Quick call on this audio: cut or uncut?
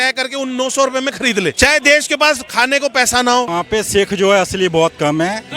cut